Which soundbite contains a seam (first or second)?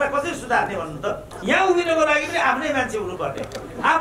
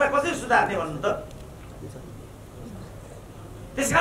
first